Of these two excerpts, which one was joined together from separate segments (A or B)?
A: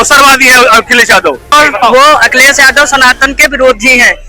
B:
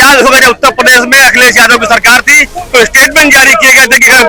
A